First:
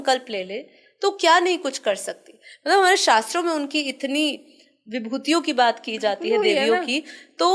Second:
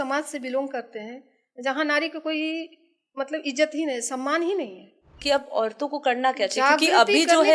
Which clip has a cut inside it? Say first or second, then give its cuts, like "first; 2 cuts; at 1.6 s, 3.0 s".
second; 1 cut; at 5.1 s